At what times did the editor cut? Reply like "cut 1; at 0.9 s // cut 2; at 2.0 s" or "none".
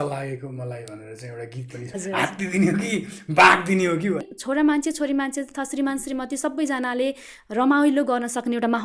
cut 1; at 1.9 s // cut 2; at 4.2 s